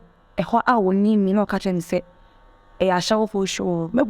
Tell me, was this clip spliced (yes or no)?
no